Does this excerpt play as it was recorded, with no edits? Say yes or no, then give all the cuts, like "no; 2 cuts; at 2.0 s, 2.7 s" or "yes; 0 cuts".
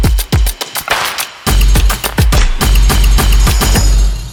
yes; 0 cuts